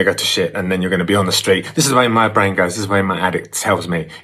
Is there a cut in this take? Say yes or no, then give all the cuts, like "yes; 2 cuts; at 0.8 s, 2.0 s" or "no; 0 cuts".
no; 0 cuts